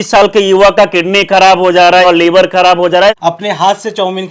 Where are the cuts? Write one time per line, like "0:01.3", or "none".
0:02.0
0:03.2